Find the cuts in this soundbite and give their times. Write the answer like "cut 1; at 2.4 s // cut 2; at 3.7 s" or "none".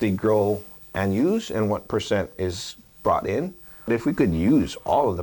cut 1; at 3.9 s